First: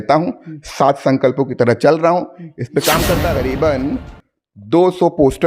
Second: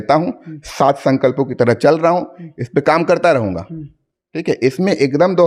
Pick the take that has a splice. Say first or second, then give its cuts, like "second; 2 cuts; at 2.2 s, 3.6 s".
first; 1 cut; at 3.3 s